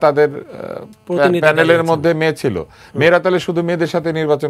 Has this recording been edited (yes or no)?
no